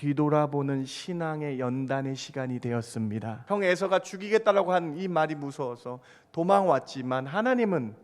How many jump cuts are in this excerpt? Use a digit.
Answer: 1